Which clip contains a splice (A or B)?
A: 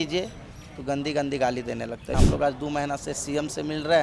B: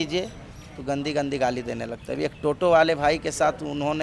A